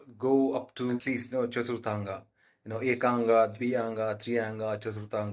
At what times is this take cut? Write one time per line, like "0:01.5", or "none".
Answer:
0:01.0